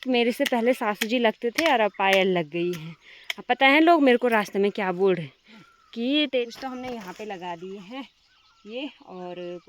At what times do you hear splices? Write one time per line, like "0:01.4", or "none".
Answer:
0:06.3